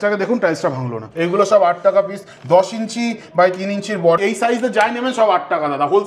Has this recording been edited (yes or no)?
yes